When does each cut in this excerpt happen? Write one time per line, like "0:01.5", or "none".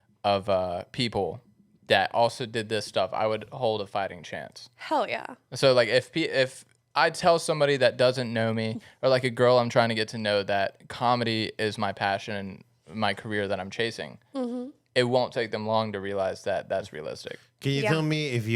none